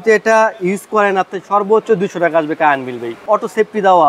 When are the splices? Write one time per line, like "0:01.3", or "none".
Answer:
0:03.2